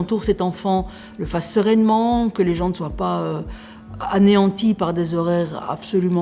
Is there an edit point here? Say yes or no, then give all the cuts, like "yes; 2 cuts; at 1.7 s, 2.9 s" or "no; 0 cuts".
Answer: no; 0 cuts